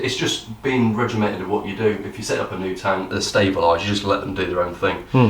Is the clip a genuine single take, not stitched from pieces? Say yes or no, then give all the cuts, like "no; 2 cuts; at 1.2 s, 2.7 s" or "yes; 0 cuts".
no; 1 cut; at 3.2 s